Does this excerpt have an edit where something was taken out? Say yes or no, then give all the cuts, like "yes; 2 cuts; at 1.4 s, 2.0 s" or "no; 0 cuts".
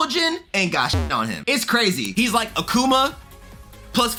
no; 0 cuts